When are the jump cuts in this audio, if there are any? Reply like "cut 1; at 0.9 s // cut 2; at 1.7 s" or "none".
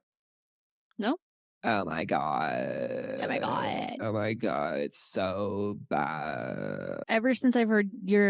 cut 1; at 1.7 s // cut 2; at 7.1 s

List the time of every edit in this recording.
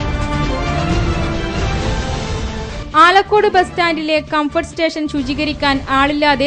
none

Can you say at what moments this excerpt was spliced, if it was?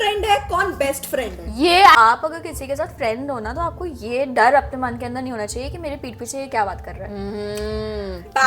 cut 1; at 1.9 s

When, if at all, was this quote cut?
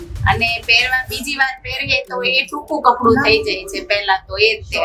none

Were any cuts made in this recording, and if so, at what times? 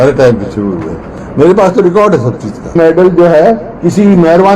cut 1; at 2.7 s

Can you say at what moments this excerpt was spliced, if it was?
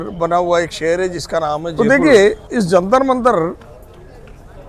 cut 1; at 1.7 s

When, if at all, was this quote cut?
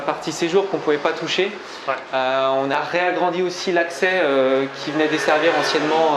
none

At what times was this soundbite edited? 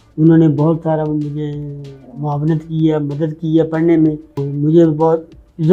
cut 1; at 4.5 s

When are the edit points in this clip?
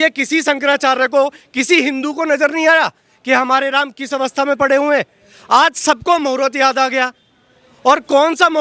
none

